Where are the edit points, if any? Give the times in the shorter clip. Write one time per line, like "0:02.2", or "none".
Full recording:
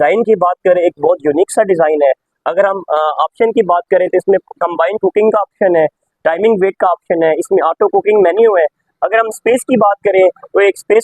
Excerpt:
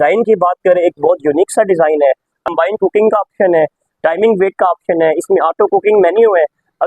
0:02.5